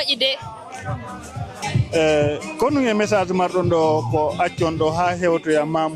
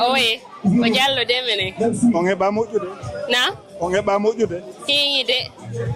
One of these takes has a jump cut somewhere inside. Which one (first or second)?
first